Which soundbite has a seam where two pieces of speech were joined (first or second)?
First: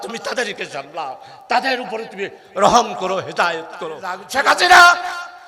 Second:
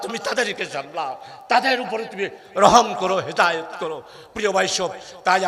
first